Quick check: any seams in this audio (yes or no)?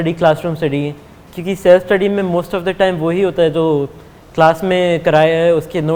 no